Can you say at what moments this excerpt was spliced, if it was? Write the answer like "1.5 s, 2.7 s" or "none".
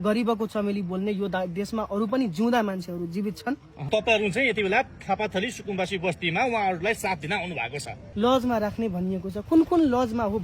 3.9 s, 8.0 s